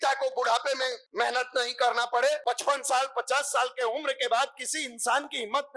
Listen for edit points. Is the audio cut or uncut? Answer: cut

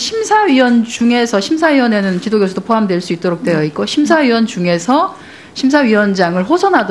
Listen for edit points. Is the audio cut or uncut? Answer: cut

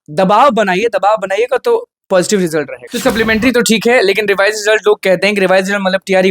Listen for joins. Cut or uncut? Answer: cut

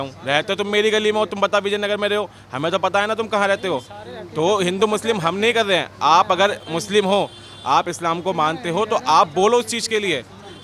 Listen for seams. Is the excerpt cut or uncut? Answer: uncut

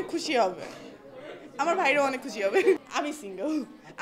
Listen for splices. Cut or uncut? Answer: cut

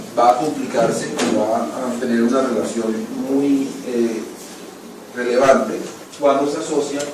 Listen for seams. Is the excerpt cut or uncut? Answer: cut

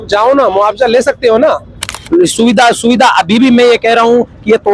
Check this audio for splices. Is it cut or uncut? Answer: cut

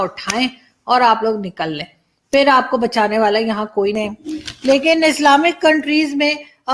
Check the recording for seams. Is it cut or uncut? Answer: cut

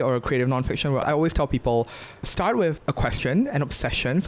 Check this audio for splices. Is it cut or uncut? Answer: cut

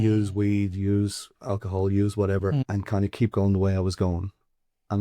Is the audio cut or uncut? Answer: cut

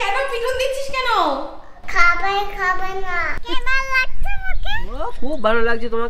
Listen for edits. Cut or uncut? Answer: cut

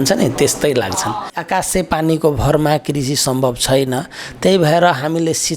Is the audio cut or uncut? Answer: cut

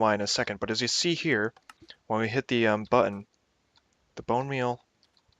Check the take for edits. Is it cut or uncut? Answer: cut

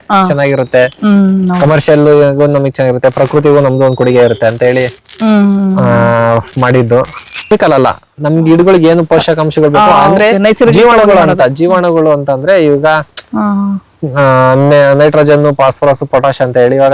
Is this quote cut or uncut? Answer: cut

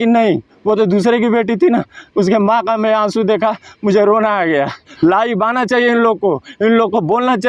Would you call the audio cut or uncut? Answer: cut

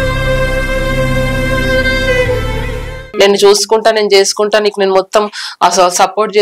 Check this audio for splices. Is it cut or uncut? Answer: cut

